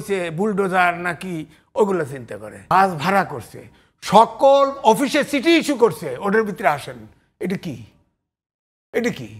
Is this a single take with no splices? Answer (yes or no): no